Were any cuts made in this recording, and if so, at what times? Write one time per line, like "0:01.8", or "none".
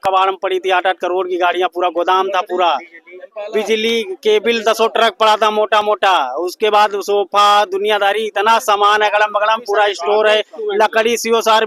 none

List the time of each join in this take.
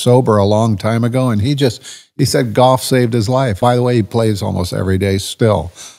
0:03.5

